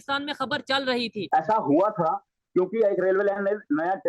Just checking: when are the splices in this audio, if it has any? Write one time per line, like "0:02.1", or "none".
0:01.2